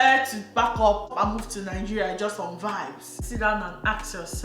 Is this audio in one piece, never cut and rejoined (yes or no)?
no